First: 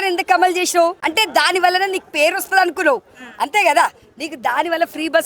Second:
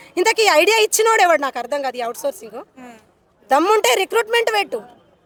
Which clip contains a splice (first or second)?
first